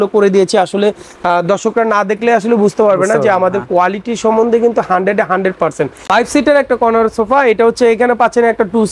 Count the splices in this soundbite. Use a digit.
1